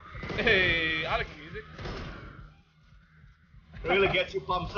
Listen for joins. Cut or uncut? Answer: uncut